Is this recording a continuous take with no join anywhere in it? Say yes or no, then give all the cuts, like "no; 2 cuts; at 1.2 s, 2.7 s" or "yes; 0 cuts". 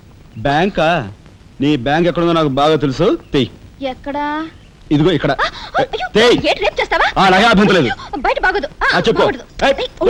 yes; 0 cuts